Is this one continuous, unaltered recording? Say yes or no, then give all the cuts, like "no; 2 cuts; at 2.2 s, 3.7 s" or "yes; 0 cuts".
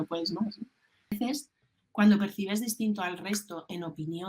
no; 1 cut; at 1.2 s